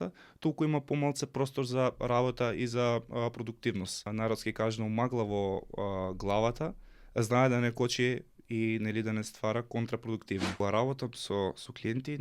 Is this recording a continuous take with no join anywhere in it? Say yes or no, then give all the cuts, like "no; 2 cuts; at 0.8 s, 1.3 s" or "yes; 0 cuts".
no; 2 cuts; at 4.1 s, 10.6 s